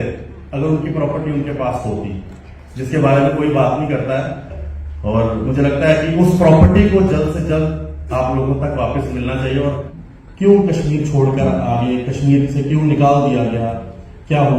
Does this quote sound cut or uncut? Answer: cut